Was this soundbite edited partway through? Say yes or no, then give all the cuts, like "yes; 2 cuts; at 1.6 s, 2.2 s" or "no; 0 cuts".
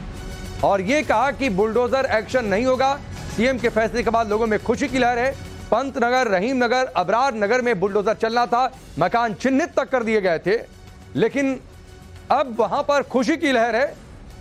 no; 0 cuts